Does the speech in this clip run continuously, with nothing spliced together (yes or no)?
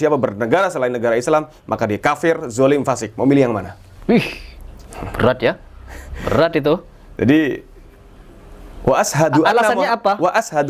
yes